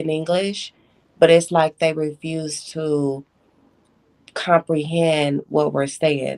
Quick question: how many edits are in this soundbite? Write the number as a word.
zero